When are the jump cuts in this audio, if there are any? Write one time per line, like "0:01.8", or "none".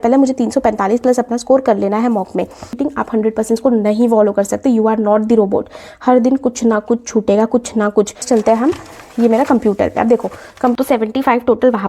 0:02.7
0:08.2
0:10.7